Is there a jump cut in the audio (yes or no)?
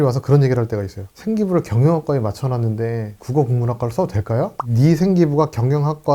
yes